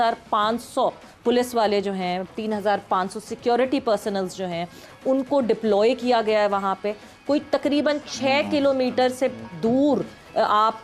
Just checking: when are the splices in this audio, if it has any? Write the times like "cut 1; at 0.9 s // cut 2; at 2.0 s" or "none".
none